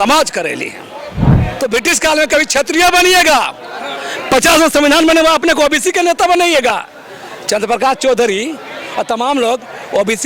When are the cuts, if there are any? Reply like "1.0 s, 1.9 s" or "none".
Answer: 1.3 s